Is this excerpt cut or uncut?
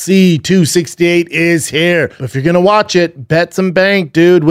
cut